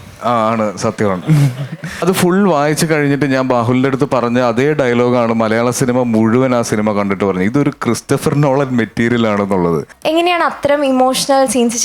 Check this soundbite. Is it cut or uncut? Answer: cut